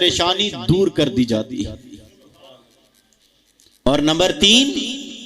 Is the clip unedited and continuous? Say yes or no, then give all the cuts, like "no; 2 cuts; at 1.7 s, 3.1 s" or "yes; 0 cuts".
yes; 0 cuts